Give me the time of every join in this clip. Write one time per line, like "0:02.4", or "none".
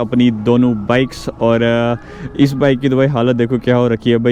none